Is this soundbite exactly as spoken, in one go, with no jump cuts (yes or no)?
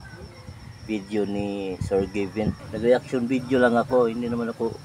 no